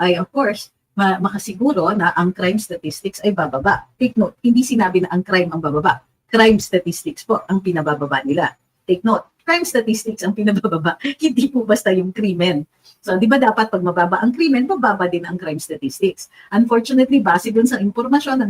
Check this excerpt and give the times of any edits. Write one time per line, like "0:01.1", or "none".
0:08.7